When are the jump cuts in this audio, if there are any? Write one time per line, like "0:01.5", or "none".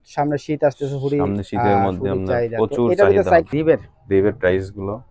0:03.5